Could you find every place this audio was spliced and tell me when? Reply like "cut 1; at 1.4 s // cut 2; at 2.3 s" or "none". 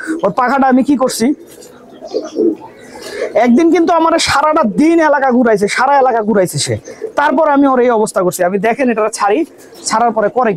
none